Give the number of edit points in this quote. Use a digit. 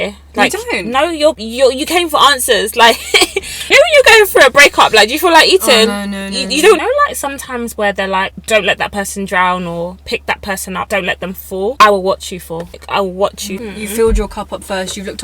8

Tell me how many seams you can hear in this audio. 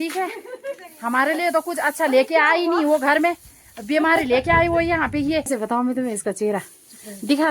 1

